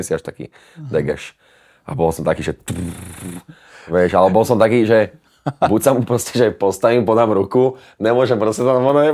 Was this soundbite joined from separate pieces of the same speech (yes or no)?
no